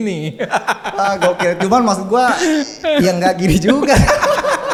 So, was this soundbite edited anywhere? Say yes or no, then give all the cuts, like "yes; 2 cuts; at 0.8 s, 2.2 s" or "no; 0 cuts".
no; 0 cuts